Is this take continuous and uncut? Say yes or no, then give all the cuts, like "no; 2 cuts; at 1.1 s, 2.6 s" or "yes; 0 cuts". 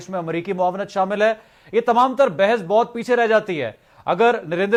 yes; 0 cuts